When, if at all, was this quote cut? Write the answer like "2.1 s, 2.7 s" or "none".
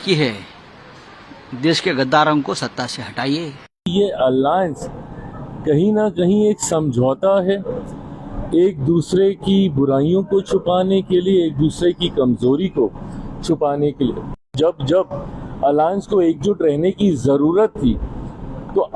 3.9 s, 14.5 s